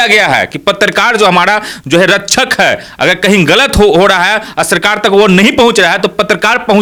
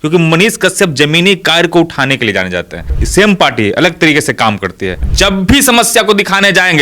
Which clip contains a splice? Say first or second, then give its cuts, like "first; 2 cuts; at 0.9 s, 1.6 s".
second; 2 cuts; at 3.0 s, 5.1 s